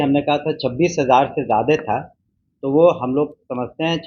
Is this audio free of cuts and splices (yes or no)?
yes